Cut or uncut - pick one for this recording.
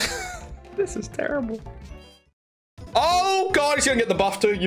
uncut